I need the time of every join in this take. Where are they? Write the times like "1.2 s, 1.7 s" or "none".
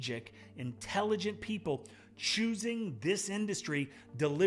none

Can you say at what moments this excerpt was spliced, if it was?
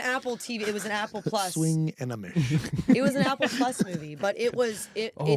none

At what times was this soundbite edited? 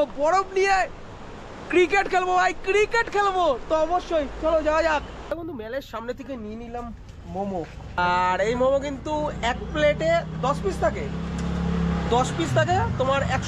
none

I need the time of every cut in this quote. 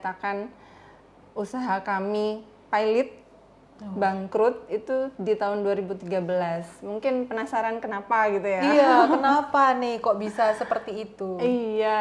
none

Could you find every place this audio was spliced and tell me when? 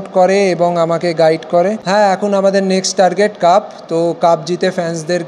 1.8 s

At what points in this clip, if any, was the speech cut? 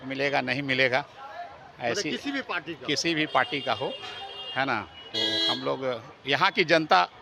none

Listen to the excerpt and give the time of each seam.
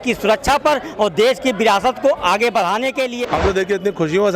3.2 s

